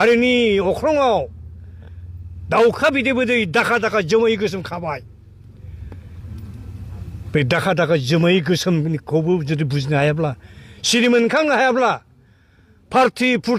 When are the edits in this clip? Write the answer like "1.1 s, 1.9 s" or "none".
none